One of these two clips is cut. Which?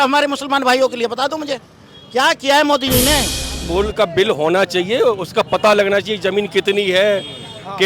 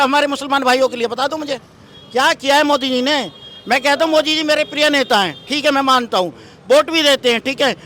first; 1 cut; at 3.5 s

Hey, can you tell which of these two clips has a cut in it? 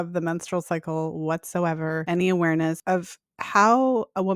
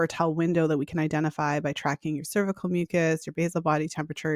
first; 2 cuts; at 2.0 s, 2.8 s

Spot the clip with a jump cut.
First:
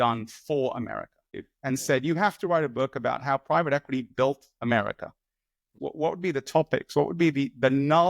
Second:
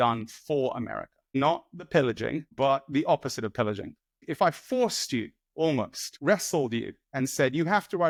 first; 2 cuts; at 1.3 s, 5.6 s

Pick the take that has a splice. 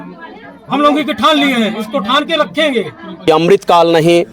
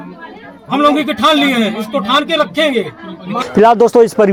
first; 1 cut; at 3.3 s

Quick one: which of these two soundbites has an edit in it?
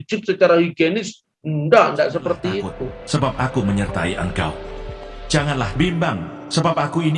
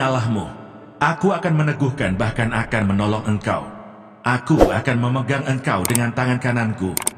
first; 1 cut; at 3.0 s

